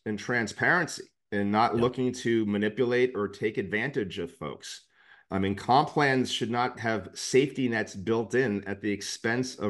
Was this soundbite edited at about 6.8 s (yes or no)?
yes